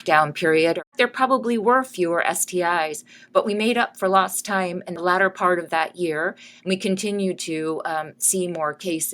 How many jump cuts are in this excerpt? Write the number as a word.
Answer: two